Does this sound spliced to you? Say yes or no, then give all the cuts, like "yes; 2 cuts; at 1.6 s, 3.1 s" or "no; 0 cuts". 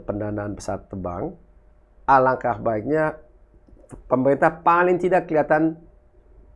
no; 0 cuts